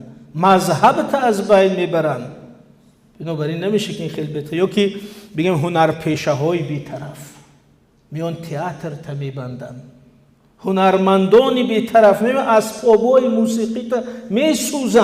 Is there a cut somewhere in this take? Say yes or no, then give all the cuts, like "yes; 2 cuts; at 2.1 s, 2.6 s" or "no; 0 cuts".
no; 0 cuts